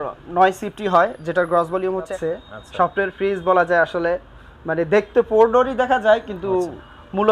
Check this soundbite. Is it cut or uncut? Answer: cut